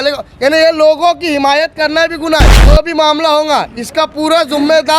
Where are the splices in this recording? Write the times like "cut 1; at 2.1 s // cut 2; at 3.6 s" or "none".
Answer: cut 1; at 2.6 s